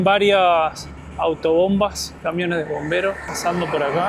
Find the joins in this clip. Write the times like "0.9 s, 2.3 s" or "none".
none